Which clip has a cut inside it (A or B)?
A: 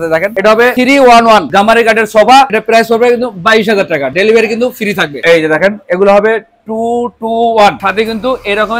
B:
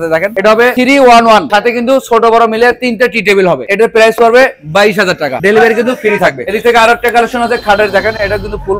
A